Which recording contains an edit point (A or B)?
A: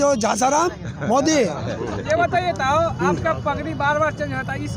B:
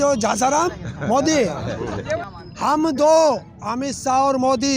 B